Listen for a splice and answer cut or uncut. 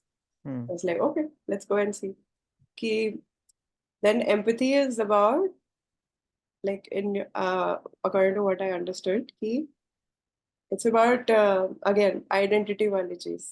cut